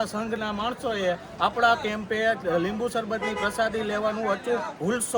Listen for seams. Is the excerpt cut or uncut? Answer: uncut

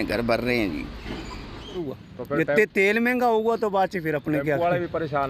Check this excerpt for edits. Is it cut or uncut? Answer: cut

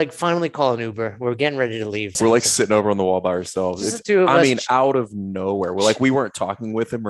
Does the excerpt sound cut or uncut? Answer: cut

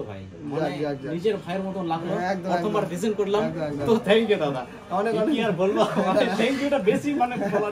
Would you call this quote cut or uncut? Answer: uncut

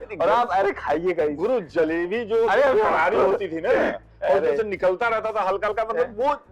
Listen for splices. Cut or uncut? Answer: uncut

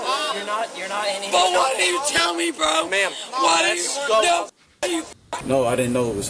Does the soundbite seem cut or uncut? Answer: cut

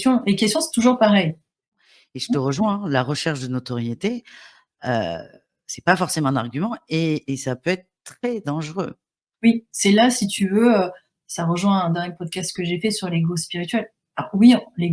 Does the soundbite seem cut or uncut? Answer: cut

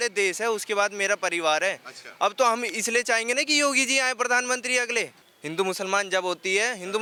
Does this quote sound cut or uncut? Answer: uncut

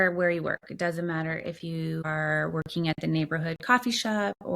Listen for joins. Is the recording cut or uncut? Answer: cut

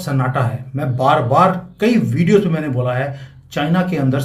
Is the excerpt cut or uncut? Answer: uncut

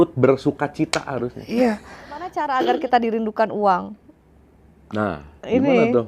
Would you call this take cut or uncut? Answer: cut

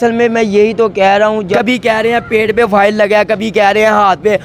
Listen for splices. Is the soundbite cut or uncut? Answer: cut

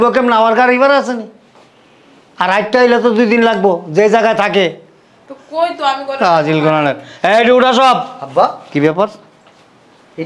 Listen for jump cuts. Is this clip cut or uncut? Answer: uncut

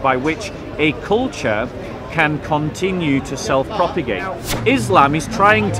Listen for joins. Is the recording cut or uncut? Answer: cut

